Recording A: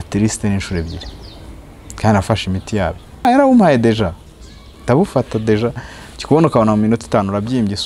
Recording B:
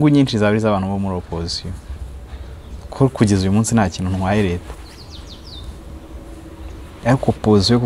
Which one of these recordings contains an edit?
A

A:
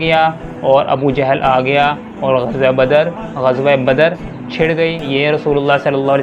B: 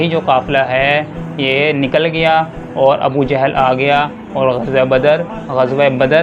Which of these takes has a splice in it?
A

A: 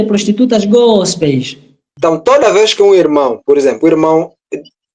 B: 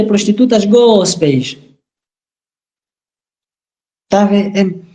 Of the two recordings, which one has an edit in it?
A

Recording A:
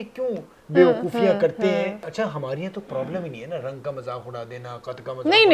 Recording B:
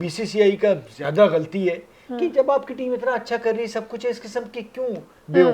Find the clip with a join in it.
A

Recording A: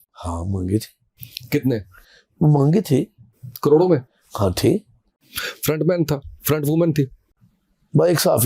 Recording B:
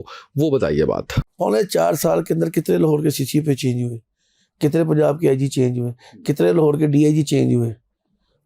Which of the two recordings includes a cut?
B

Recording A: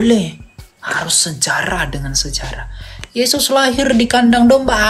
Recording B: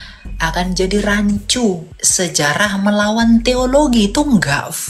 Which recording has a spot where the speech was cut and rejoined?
B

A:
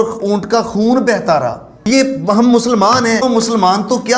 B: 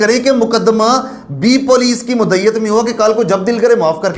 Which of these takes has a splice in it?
A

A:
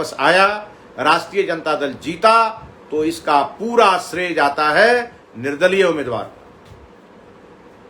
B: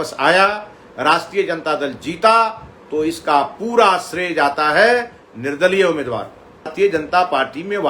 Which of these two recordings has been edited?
B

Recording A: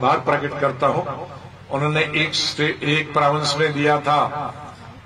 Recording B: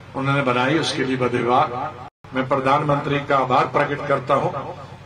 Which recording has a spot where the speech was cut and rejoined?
B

